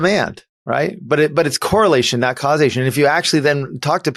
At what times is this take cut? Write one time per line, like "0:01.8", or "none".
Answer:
none